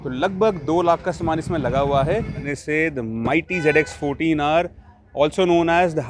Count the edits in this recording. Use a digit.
1